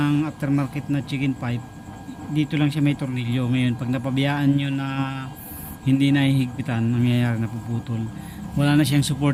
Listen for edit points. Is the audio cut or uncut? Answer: uncut